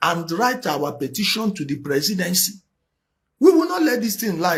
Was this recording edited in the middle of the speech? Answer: no; 0 cuts

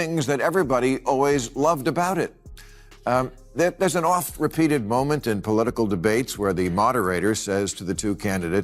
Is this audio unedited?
yes; 0 cuts

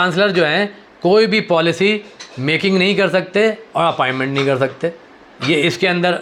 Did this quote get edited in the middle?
no; 0 cuts

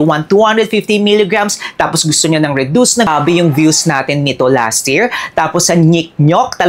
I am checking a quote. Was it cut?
yes; 1 cut; at 3.1 s

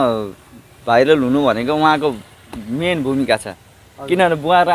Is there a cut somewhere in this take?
no; 0 cuts

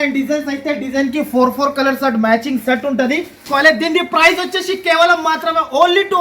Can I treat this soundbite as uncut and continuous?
no; 1 cut; at 3.4 s

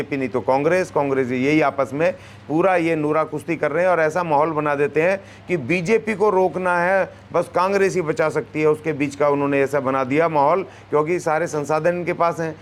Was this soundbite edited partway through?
no; 0 cuts

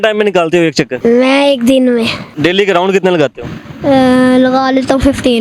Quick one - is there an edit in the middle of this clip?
yes; 2 cuts; at 0.9 s, 2.2 s

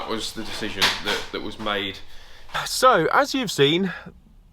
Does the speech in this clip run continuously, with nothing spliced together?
no; 1 cut; at 2.4 s

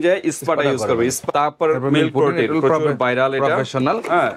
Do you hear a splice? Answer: yes; 1 cut; at 1.2 s

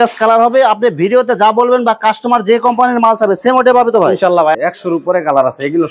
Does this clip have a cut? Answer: yes; 1 cut; at 4.6 s

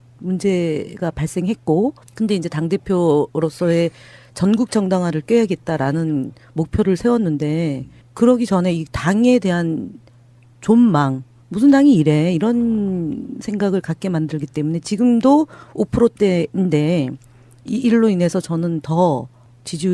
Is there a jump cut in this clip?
no; 0 cuts

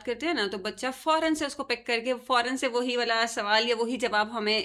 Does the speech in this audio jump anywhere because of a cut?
no; 0 cuts

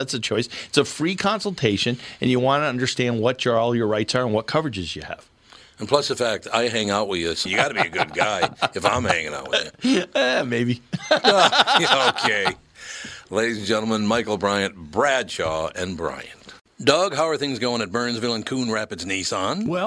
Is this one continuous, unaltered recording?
no; 1 cut; at 16.6 s

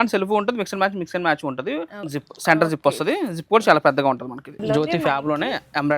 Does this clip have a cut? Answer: yes; 2 cuts; at 2.0 s, 4.6 s

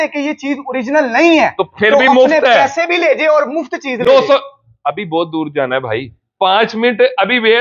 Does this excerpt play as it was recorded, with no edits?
yes; 0 cuts

